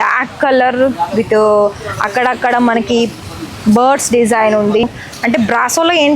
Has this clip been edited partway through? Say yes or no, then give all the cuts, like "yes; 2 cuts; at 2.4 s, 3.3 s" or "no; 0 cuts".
yes; 1 cut; at 4.8 s